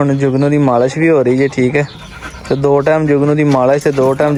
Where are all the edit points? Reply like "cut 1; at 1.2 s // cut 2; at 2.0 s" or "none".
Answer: none